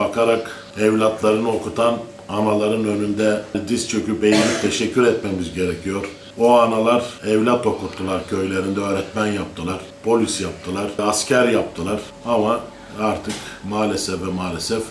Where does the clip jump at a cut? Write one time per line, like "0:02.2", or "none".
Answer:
0:06.2
0:07.1
0:09.9

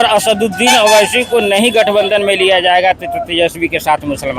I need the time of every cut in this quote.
none

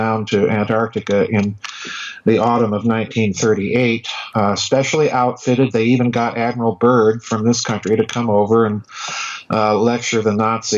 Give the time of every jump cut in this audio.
0:08.1

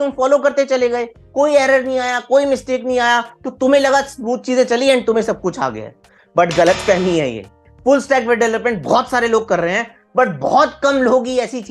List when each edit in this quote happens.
0:07.5

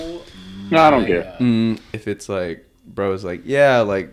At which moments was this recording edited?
0:01.8

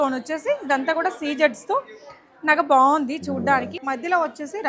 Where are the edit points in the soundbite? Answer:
0:03.7

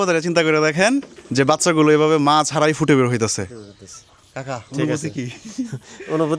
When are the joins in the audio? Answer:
0:01.2

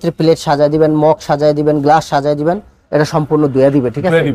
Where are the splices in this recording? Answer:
none

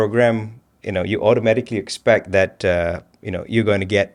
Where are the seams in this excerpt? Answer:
none

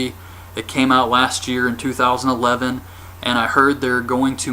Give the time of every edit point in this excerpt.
0:03.2

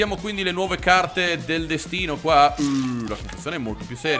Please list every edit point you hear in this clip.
none

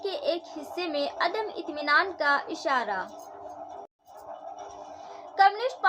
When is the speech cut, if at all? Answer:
0:04.0

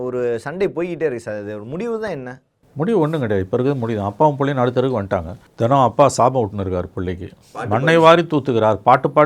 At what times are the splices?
0:05.4

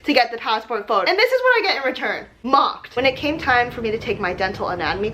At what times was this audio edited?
0:02.8

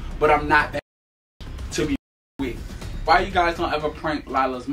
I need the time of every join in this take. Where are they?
0:03.0

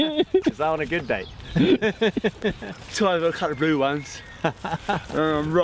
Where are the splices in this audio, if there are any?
none

